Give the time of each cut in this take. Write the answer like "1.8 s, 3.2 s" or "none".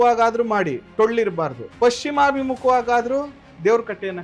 1.6 s